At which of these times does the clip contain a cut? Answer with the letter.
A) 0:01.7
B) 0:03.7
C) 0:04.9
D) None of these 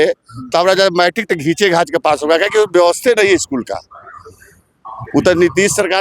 D